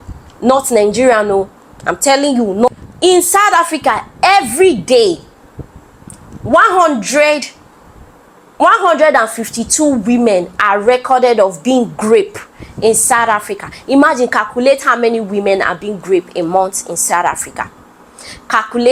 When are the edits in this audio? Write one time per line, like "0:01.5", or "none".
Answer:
none